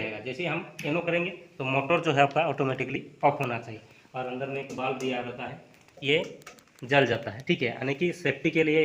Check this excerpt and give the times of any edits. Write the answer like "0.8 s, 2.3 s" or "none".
none